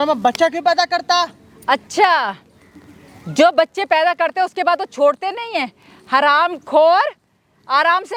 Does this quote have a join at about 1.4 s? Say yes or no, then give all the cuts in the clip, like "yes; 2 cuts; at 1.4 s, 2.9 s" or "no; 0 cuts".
no; 0 cuts